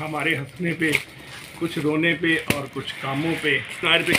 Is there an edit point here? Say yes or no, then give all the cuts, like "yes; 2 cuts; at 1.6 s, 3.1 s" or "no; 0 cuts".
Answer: no; 0 cuts